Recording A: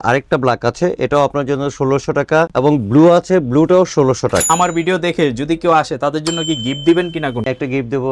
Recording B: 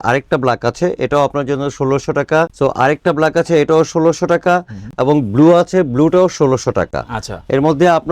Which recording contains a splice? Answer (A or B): A